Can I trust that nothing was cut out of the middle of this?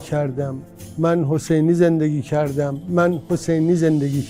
yes; 0 cuts

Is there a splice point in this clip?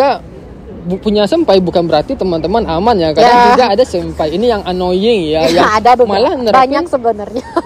no; 0 cuts

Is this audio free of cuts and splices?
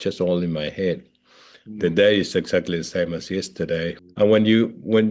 no; 1 cut; at 4.0 s

